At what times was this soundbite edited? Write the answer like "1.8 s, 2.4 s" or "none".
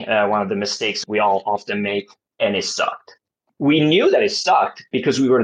none